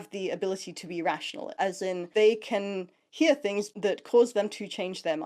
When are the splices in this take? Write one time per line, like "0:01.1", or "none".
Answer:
0:01.5
0:03.7